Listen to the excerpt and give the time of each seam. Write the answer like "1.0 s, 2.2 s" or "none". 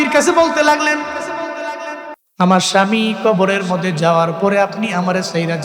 2.2 s